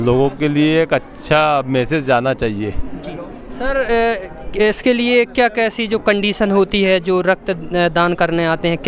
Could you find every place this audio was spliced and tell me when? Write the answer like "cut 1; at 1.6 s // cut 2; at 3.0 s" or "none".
none